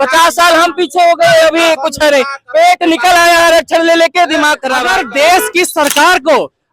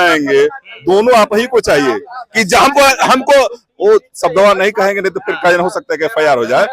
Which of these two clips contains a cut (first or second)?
first